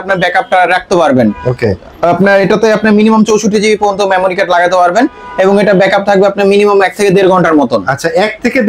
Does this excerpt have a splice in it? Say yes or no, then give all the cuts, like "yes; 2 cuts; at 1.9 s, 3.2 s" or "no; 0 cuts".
no; 0 cuts